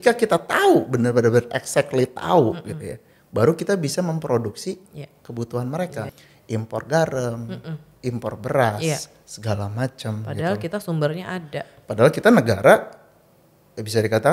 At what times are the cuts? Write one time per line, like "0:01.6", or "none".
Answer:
0:06.0